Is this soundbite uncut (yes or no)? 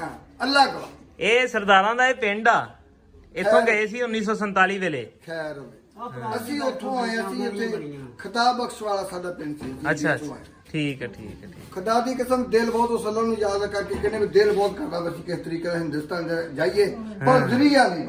yes